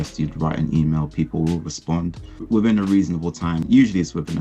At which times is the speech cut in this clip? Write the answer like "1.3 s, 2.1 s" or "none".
2.5 s, 3.6 s